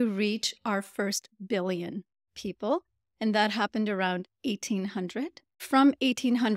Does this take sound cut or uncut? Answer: cut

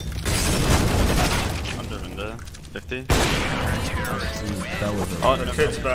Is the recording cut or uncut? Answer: uncut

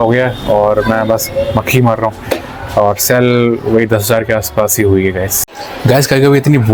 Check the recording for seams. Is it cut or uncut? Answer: uncut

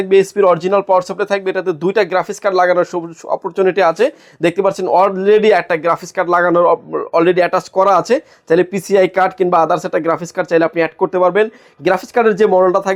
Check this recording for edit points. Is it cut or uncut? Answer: uncut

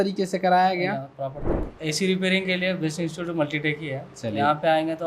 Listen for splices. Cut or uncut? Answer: cut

